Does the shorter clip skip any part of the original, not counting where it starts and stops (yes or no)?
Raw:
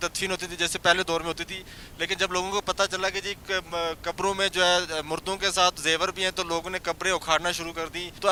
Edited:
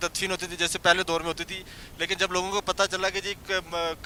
no